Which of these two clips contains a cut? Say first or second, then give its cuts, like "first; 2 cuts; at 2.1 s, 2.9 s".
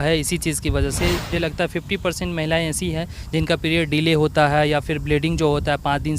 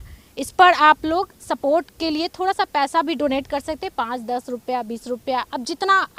first; 1 cut; at 1.3 s